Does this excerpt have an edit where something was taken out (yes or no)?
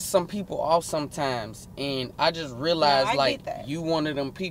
no